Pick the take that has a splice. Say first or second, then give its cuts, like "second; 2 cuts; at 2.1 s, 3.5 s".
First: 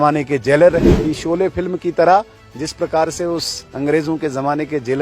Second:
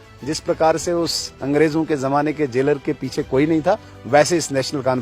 first; 1 cut; at 0.9 s